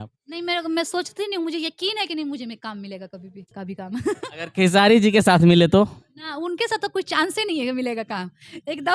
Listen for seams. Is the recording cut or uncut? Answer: cut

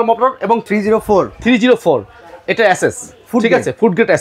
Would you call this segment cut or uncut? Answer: uncut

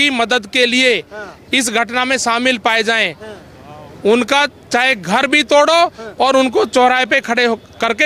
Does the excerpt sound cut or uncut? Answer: uncut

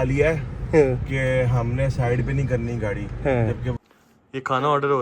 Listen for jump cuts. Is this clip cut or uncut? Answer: cut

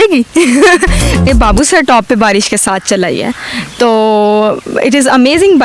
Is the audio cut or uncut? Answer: cut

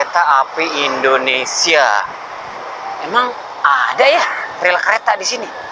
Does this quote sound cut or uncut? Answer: uncut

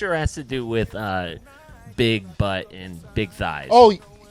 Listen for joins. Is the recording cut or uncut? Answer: uncut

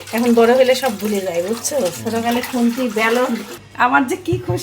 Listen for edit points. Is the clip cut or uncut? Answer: cut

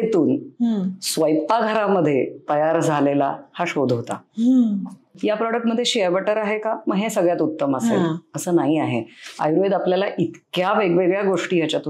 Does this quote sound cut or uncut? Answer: cut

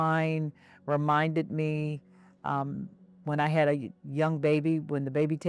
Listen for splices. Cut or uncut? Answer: uncut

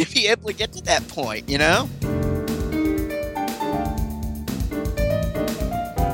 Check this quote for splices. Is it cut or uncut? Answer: cut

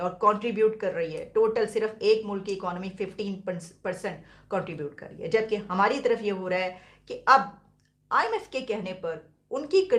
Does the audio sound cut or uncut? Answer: uncut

